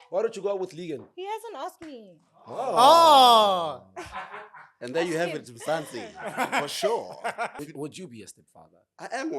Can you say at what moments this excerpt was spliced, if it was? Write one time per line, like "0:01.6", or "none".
0:07.5